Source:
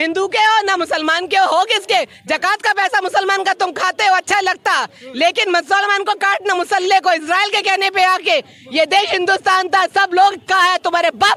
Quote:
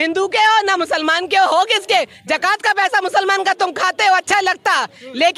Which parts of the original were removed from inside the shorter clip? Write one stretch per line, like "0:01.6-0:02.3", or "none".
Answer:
none